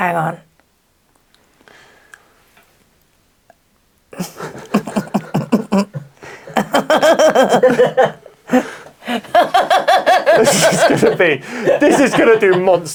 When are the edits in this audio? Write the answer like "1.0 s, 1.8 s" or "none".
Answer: none